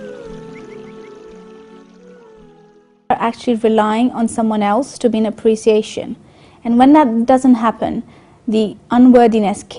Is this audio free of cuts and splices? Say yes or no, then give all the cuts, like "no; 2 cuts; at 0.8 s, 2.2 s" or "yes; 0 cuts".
yes; 0 cuts